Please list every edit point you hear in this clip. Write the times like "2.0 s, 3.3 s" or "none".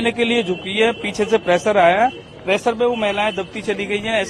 none